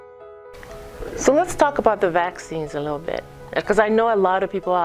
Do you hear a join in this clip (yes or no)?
yes